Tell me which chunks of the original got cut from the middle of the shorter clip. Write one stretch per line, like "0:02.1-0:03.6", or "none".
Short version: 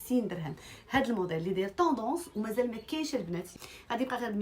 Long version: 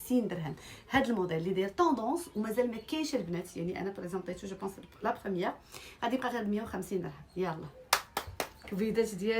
0:03.5-0:05.6

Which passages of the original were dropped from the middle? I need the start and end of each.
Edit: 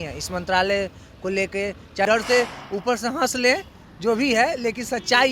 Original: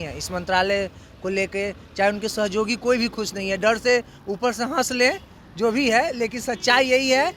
0:02.1-0:03.6

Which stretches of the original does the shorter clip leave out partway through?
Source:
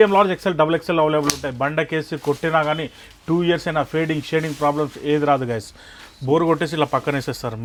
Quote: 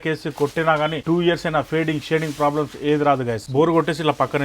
0:02.9-0:03.2
0:05.6-0:06.1

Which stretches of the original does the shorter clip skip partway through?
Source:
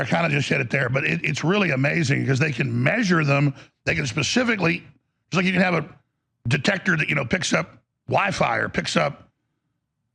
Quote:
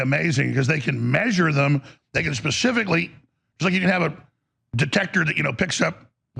none

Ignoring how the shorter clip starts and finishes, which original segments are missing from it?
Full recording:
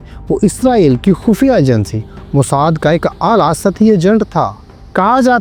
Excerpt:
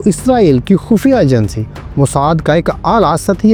none

